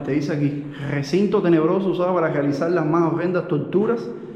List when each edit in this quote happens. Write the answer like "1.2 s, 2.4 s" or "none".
none